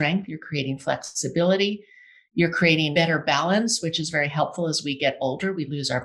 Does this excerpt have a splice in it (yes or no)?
yes